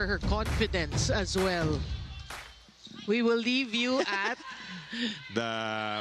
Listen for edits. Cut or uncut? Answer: cut